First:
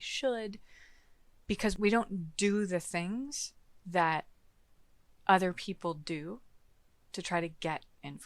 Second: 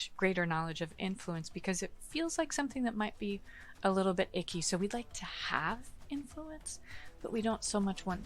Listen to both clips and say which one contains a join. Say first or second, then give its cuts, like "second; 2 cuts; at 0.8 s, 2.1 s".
first; 1 cut; at 1.8 s